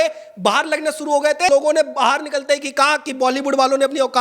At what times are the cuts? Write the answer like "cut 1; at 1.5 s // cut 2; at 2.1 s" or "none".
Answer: cut 1; at 1.5 s